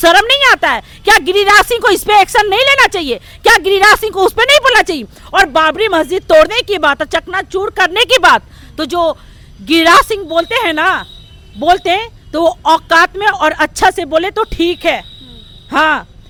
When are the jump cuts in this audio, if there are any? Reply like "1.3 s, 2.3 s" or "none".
none